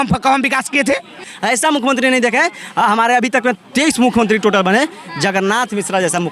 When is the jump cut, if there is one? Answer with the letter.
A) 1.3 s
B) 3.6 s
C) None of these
A